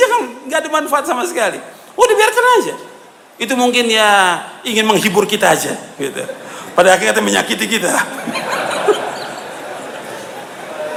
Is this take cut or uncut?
uncut